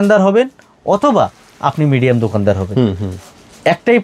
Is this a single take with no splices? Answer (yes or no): yes